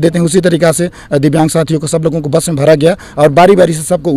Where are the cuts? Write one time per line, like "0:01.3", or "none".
none